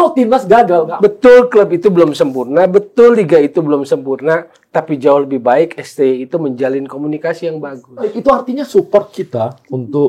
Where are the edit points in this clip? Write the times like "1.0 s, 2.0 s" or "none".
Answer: 0.9 s, 8.2 s